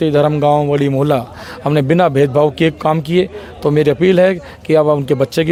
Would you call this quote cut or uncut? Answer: uncut